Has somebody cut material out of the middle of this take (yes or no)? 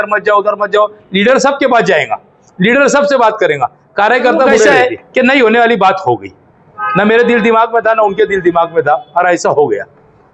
yes